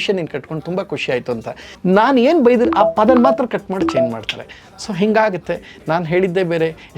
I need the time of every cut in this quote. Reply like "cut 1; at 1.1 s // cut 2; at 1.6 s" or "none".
cut 1; at 1.7 s